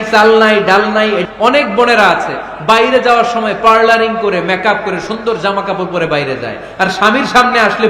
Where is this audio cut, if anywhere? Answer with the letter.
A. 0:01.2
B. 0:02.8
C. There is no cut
A